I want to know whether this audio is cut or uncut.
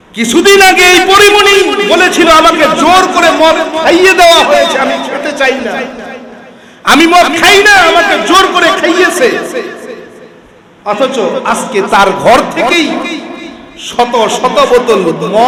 uncut